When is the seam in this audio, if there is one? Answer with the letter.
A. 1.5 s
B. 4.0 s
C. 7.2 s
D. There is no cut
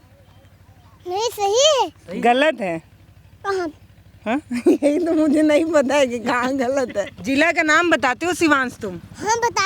C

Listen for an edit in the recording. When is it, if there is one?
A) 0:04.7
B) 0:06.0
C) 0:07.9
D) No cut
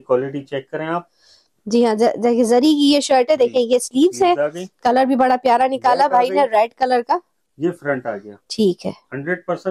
D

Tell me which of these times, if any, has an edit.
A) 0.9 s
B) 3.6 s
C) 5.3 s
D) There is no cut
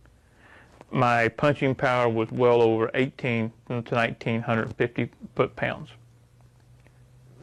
D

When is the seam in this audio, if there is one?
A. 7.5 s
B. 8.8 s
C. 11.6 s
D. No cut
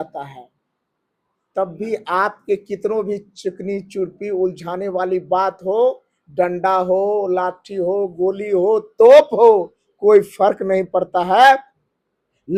D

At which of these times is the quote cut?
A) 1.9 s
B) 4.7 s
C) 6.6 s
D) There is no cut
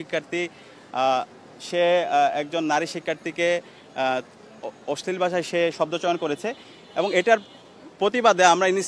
D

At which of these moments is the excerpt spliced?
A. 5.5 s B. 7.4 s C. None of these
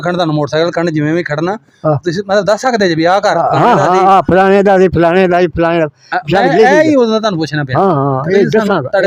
C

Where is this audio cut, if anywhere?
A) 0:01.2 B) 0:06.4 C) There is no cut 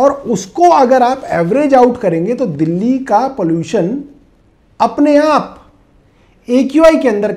C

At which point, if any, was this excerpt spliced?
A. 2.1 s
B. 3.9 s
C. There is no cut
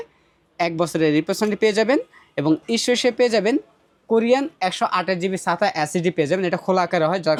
C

